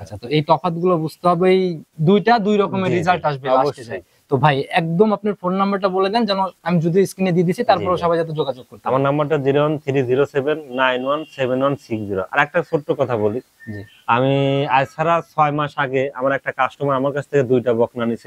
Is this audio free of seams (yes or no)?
yes